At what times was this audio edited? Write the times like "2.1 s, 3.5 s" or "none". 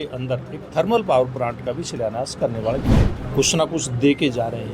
3.0 s